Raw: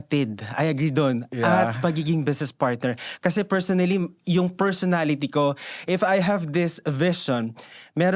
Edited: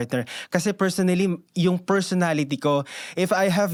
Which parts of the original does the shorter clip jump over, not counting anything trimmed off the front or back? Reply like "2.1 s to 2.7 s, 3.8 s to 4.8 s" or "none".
none